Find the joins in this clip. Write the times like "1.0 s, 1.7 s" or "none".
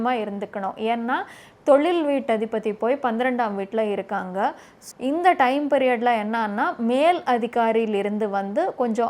4.8 s